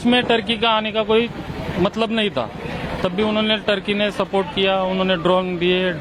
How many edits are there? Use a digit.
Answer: 0